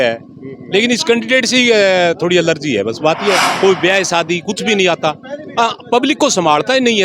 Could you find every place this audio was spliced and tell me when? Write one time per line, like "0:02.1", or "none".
0:03.5